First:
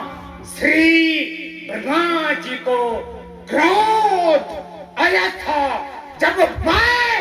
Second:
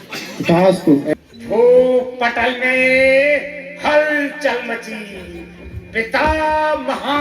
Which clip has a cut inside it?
second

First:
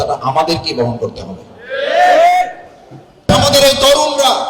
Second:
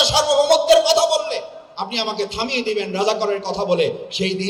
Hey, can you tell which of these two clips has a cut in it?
first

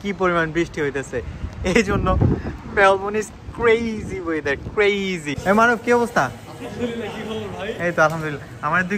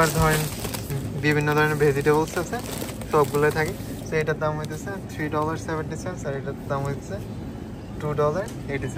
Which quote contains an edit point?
first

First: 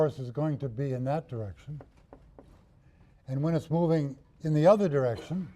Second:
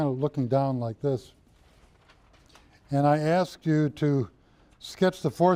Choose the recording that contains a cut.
first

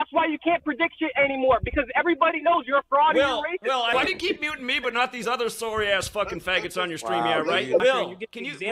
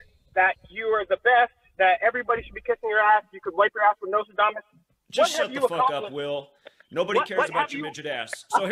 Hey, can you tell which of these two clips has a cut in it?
first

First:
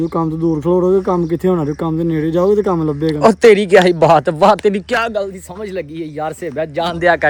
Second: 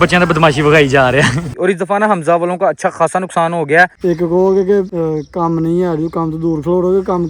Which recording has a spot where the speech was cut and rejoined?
second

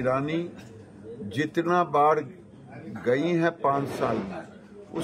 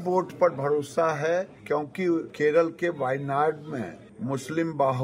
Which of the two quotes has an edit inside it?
second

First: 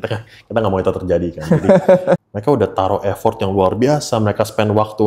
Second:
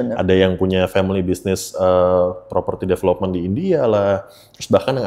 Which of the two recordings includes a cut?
first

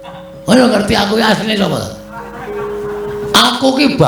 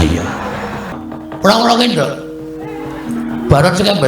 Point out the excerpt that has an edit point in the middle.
second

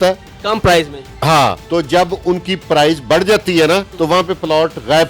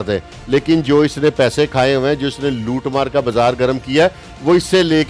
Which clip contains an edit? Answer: first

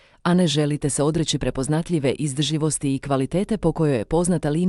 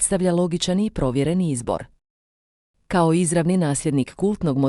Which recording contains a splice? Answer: second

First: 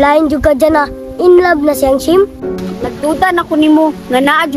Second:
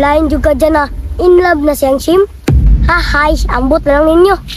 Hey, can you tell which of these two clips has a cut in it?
first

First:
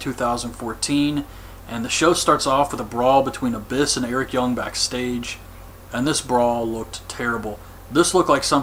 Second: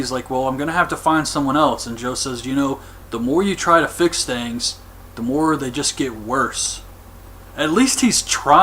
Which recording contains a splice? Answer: second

